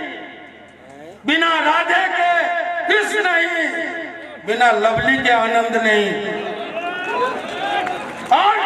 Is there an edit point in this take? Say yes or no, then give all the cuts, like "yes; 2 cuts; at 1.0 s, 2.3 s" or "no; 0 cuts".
no; 0 cuts